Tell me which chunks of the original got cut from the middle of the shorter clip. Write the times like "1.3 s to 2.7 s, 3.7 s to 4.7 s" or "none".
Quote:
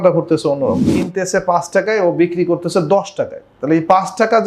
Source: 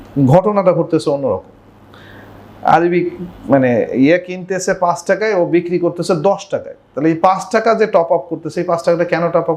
1.6 s to 4.3 s